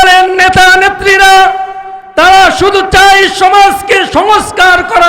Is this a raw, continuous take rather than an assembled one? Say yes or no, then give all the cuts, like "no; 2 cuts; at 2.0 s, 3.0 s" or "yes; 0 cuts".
no; 1 cut; at 4.1 s